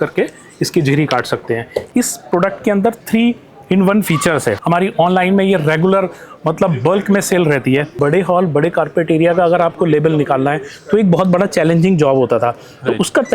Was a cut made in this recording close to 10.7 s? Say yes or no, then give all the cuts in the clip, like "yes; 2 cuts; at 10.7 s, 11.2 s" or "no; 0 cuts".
no; 3 cuts; at 1.9 s, 4.6 s, 8.0 s